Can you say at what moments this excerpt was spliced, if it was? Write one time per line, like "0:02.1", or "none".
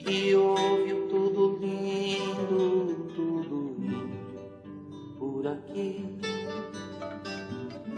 0:04.5